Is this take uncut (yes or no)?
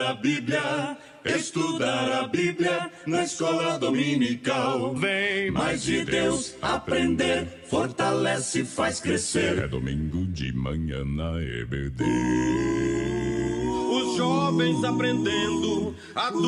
yes